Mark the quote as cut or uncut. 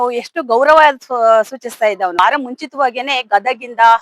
cut